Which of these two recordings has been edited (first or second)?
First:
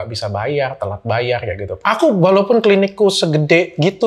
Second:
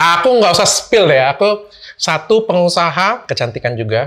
first